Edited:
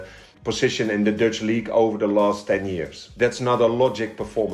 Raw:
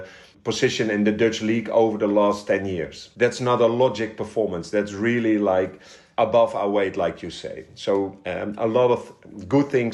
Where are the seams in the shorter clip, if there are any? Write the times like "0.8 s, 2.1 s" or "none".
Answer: none